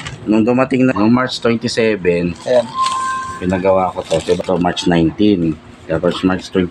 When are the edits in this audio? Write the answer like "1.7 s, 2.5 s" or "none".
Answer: 0.9 s, 4.4 s